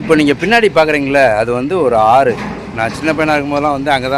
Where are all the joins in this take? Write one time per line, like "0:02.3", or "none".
none